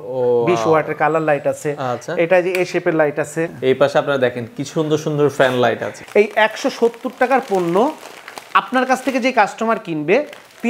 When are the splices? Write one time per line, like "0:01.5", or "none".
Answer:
0:03.5
0:05.9